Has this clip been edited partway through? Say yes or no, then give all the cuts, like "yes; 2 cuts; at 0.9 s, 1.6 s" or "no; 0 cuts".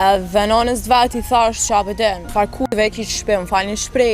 yes; 1 cut; at 2.2 s